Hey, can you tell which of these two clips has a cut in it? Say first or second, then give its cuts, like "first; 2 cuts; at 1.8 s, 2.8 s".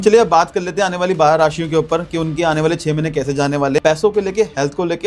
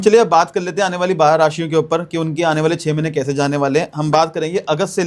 first; 1 cut; at 3.8 s